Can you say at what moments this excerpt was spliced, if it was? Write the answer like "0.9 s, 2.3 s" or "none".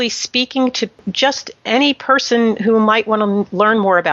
1.1 s